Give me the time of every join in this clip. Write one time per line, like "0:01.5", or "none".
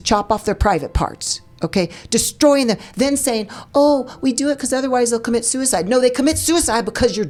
none